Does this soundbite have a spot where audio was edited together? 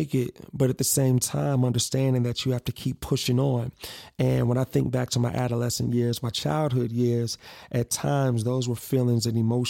no; 0 cuts

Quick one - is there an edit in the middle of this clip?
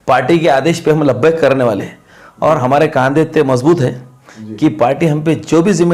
no; 0 cuts

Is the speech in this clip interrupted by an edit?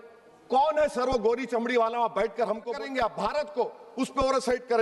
yes; 1 cut; at 2.7 s

